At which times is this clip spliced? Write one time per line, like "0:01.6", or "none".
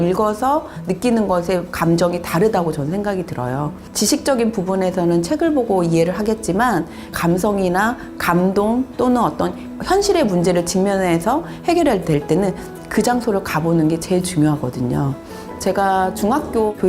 0:15.4